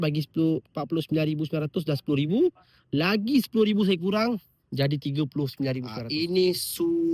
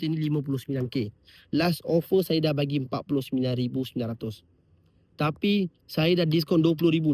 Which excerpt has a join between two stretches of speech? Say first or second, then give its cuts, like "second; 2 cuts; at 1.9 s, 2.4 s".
first; 1 cut; at 6.0 s